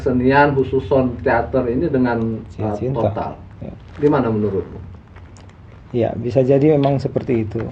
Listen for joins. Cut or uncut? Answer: uncut